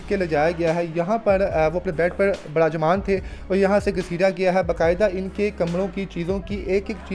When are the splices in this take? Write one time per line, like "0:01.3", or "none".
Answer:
none